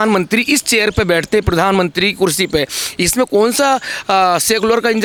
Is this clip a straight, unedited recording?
yes; 0 cuts

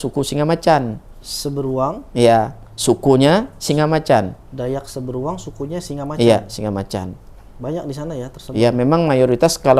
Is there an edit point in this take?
no; 0 cuts

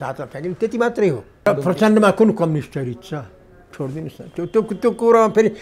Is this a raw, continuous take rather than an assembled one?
no; 1 cut; at 1.5 s

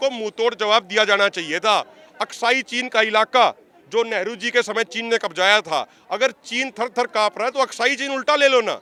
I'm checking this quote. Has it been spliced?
no; 0 cuts

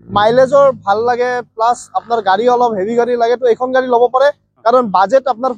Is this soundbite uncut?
yes; 0 cuts

